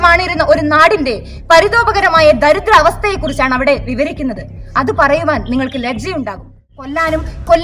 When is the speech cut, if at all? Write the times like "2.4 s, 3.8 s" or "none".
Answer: 6.6 s

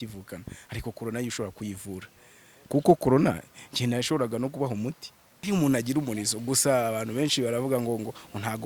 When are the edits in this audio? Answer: 2.7 s, 5.3 s

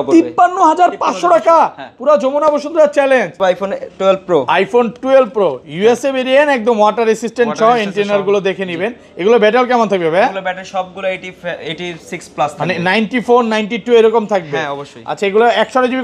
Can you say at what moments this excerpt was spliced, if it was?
3.3 s

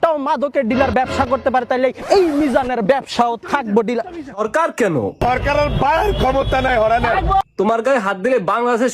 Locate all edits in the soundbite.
4.4 s

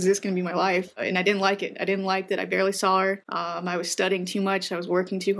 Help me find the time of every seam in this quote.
1.0 s, 3.3 s

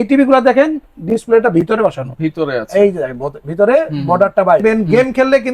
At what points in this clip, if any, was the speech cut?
4.6 s

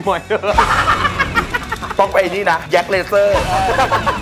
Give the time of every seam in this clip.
1.9 s

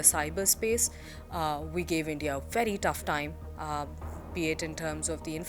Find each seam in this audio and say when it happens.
none

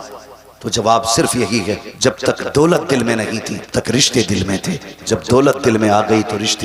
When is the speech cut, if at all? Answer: 1.9 s, 3.7 s, 5.1 s

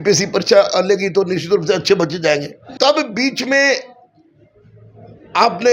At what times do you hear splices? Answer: 2.6 s

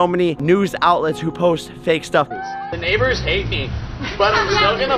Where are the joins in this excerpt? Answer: 2.3 s

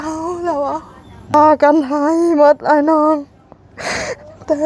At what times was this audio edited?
1.3 s

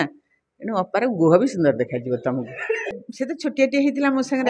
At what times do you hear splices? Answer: 3.0 s

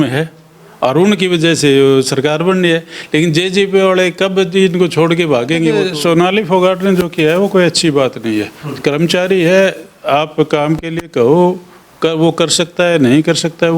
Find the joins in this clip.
5.8 s

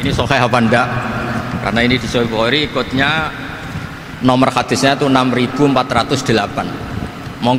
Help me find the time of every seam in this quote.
none

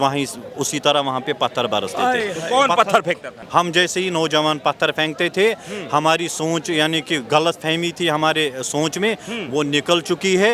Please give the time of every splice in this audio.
3.3 s

